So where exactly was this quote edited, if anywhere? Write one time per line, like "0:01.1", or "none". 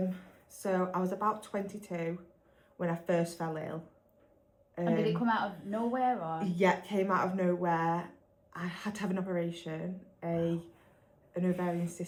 none